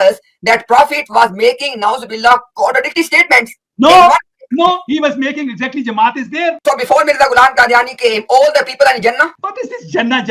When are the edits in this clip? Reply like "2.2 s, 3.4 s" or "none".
6.6 s